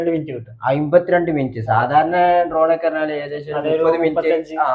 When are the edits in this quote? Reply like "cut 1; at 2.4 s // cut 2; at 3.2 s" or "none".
none